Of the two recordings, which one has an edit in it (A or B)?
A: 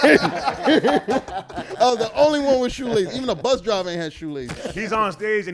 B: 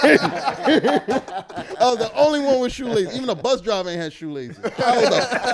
A